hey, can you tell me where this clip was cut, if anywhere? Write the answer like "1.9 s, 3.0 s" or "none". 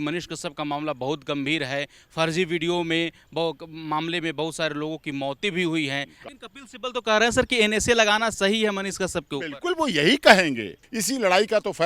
6.1 s, 10.9 s